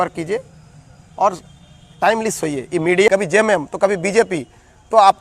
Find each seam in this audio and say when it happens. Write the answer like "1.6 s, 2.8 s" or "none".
3.1 s